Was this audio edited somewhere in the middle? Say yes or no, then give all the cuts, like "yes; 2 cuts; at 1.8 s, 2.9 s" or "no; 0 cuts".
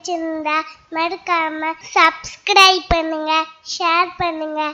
yes; 1 cut; at 1.8 s